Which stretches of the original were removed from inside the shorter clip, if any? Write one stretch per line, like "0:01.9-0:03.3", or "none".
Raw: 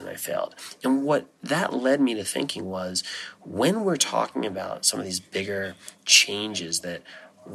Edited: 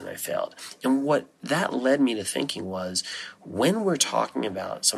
none